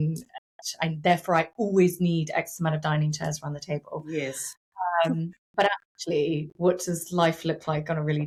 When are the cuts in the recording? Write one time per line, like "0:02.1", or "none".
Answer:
none

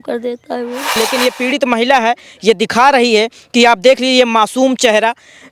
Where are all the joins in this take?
0:01.0

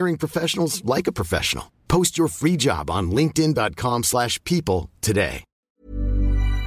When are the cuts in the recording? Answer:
0:05.7

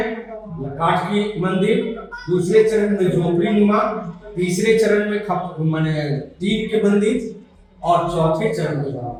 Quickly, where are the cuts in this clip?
none

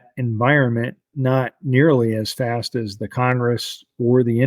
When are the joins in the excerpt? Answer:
none

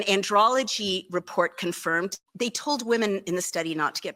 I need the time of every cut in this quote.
0:02.2

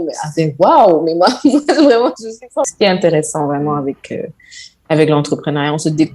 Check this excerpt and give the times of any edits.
0:02.7

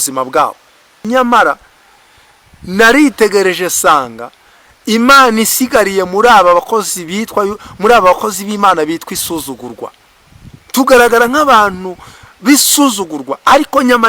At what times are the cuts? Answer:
0:01.0

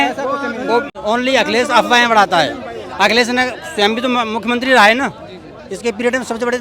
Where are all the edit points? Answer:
0:00.9

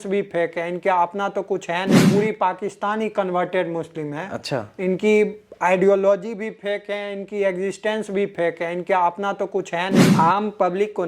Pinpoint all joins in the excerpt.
0:02.0
0:10.1

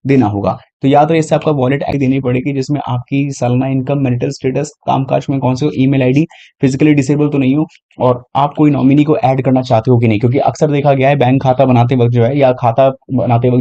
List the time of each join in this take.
0:02.0

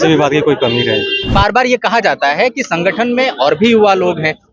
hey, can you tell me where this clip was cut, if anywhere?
0:01.3

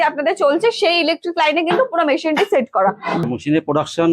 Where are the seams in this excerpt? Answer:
0:03.2

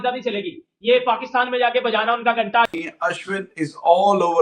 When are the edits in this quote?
0:02.7

